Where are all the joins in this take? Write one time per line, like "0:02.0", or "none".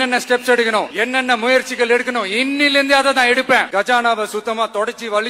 0:00.9
0:03.7